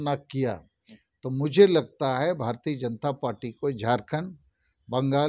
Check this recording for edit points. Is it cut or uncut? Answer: uncut